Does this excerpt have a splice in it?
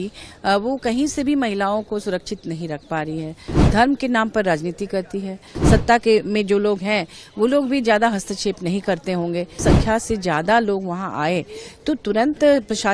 yes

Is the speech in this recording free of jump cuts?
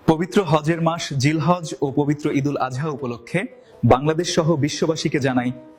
yes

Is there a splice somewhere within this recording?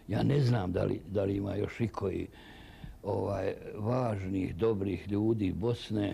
no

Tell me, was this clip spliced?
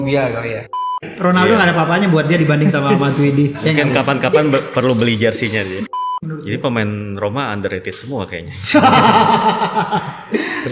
yes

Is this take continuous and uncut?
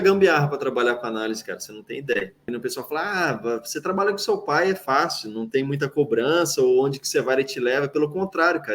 no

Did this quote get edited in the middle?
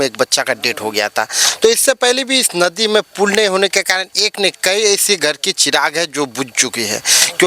no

